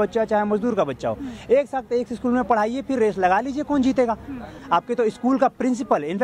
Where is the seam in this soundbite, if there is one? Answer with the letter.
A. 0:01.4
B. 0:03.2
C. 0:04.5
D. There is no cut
C